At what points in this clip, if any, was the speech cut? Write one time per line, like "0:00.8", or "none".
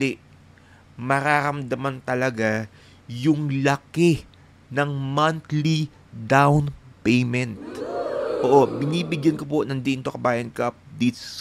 none